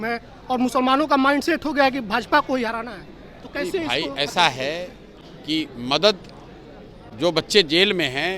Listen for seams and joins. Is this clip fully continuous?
yes; 0 cuts

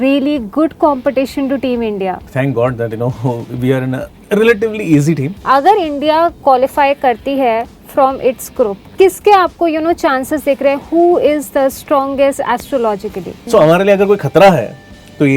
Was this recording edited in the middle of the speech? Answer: yes; 3 cuts; at 2.2 s, 5.3 s, 13.3 s

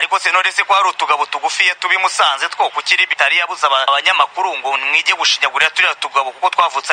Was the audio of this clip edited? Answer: no; 0 cuts

